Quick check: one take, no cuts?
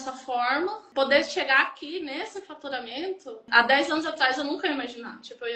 no; 2 cuts; at 0.8 s, 3.5 s

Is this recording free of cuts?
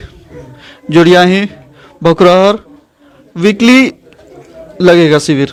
yes; 0 cuts

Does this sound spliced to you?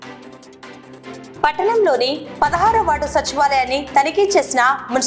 yes; 1 cut; at 1.3 s

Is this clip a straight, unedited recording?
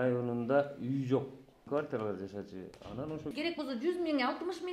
no; 2 cuts; at 1.7 s, 3.3 s

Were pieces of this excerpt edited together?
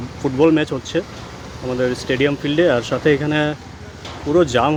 no; 0 cuts

